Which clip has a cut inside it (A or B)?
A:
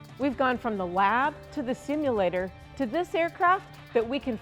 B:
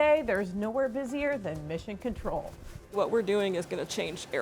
B